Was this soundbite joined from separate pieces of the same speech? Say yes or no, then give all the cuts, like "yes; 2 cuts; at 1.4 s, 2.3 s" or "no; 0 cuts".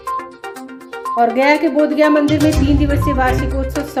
no; 0 cuts